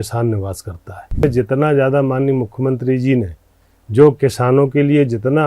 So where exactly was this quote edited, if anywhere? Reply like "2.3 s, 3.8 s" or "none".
1.2 s